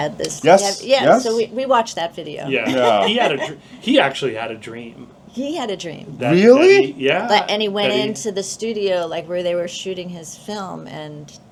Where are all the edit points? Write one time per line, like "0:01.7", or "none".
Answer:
none